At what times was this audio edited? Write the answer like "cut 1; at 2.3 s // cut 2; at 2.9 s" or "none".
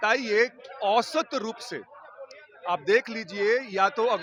none